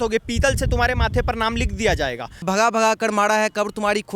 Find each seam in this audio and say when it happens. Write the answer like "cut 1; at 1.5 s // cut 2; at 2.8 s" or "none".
cut 1; at 2.4 s

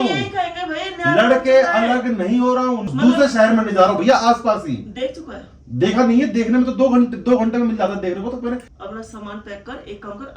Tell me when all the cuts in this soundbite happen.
cut 1; at 2.9 s // cut 2; at 8.8 s

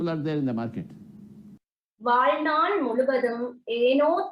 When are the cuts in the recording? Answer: cut 1; at 1.5 s

